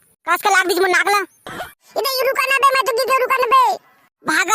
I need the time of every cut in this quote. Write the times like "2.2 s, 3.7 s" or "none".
1.6 s